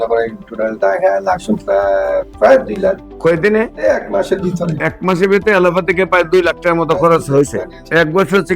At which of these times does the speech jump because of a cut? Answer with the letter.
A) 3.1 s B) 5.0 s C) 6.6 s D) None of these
D